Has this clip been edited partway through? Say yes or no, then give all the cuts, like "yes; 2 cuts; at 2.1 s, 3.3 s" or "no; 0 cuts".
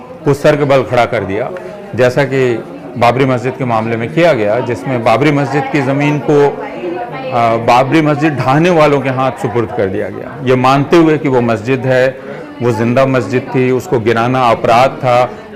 no; 0 cuts